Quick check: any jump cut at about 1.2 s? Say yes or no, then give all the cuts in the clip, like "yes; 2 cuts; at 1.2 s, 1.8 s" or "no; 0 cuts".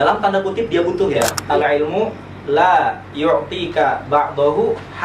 yes; 1 cut; at 1.2 s